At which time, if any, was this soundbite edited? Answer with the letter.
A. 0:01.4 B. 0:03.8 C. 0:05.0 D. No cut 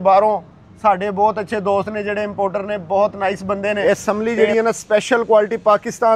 B